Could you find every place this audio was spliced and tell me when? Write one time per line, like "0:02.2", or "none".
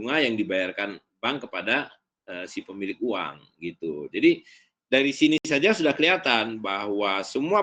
0:05.4